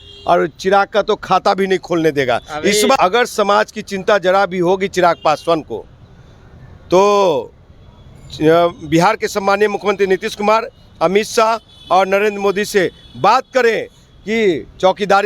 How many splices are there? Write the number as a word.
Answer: one